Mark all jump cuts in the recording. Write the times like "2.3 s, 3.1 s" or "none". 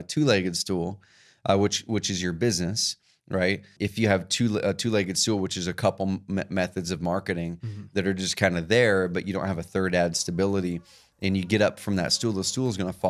3.7 s